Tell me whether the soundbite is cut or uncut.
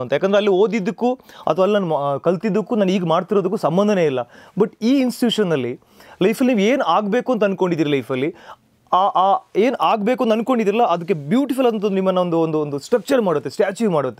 uncut